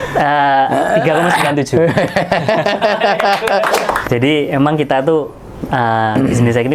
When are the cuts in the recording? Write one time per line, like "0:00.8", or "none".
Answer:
0:04.0